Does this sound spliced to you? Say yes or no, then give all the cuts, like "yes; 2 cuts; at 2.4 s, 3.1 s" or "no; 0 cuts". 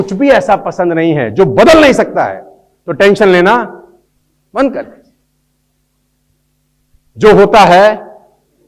no; 0 cuts